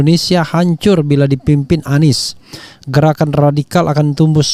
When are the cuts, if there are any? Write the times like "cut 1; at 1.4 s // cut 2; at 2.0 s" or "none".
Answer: none